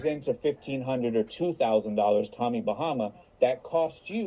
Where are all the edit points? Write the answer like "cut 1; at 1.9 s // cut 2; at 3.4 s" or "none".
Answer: cut 1; at 1.7 s